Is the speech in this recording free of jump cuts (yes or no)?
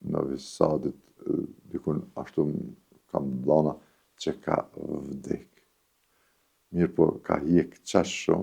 yes